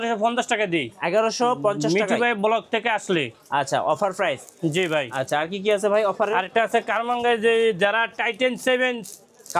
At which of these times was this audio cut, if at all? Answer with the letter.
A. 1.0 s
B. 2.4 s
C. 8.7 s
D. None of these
D